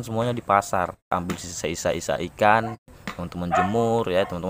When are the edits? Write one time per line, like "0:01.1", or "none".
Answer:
0:01.1
0:03.0